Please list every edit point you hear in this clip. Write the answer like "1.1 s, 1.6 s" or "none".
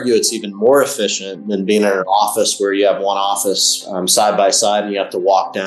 none

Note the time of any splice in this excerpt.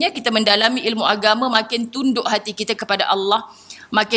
none

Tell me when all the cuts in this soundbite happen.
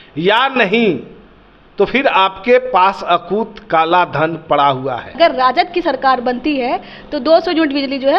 5.2 s

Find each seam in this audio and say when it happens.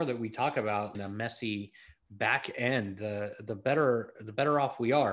1.0 s

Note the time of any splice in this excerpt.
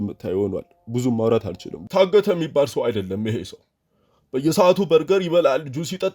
1.8 s

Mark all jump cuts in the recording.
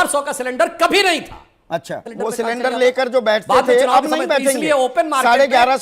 2.1 s, 4.9 s

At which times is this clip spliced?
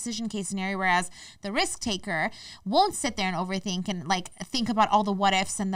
none

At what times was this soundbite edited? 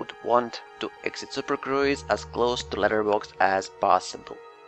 none

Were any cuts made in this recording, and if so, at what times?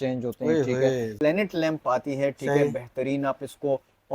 1.1 s

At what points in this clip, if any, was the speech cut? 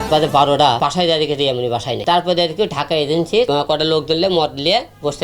0.8 s, 2.0 s, 3.5 s

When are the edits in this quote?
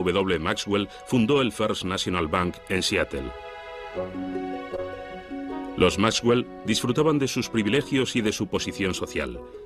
4.0 s

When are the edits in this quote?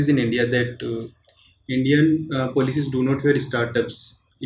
none

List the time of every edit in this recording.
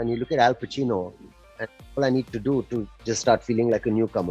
none

